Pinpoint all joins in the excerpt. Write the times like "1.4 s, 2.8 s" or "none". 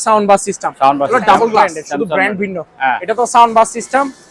1.8 s